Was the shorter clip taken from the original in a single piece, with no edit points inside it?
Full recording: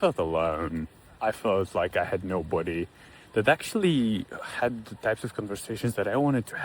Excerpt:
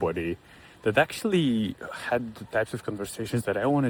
yes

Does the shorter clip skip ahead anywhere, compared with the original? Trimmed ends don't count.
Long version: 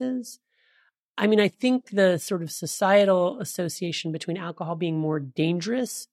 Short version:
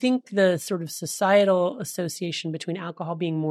no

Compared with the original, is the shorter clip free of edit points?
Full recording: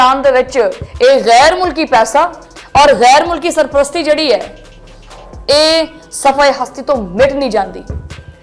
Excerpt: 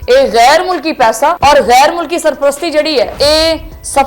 no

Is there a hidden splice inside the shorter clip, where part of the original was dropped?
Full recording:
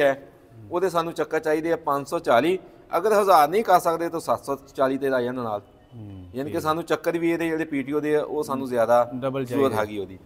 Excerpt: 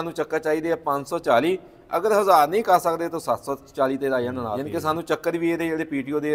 yes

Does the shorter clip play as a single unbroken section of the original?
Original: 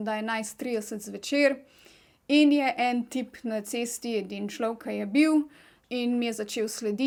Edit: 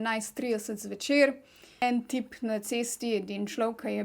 no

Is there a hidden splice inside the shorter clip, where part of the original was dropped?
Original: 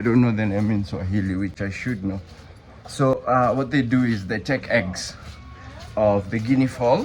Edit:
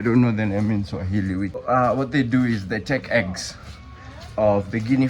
yes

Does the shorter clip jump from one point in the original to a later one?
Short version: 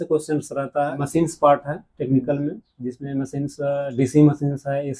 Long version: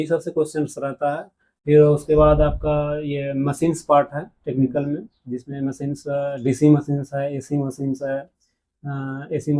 yes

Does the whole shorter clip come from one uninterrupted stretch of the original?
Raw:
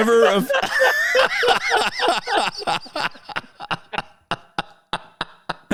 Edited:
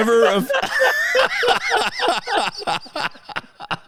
yes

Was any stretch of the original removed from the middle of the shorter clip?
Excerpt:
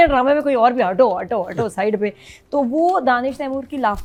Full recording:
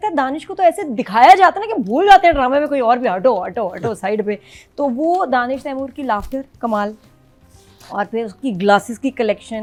no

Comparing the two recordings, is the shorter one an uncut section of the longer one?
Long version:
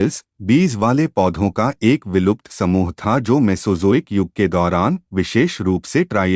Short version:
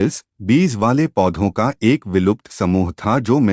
yes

